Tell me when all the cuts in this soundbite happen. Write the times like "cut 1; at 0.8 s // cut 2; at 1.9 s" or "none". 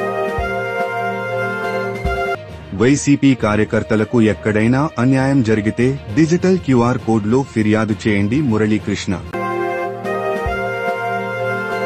cut 1; at 2.5 s